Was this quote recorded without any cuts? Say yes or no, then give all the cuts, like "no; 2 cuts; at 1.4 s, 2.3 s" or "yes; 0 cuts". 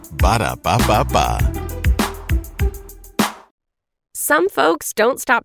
no; 1 cut; at 3.4 s